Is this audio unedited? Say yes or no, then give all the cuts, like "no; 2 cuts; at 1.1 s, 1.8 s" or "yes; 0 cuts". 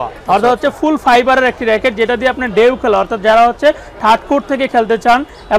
yes; 0 cuts